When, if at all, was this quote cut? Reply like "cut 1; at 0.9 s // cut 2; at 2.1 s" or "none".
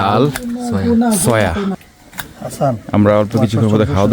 cut 1; at 1.7 s